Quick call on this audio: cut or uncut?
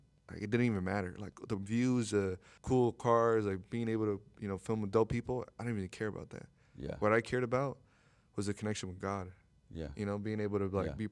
uncut